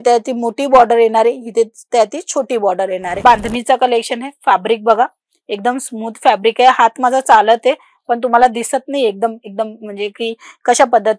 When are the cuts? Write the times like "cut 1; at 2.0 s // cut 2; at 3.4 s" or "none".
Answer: cut 1; at 3.2 s